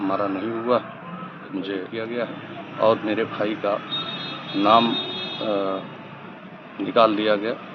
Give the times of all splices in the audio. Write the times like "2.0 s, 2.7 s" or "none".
1.9 s